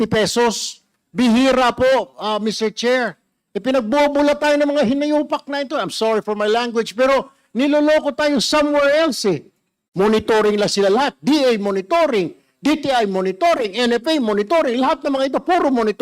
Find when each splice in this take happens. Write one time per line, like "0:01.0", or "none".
0:09.8

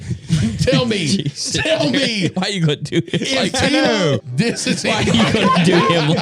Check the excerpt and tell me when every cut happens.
0:04.2

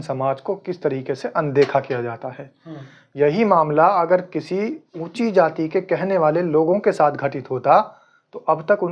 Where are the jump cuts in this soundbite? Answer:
none

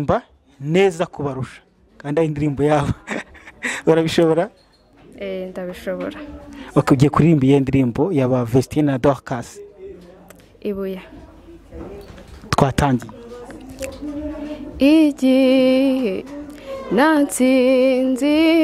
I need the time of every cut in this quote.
none

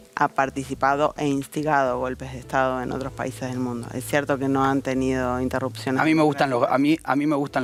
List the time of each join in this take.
none

